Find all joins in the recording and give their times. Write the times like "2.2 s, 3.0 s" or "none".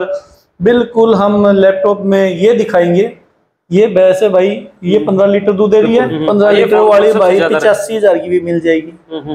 6.2 s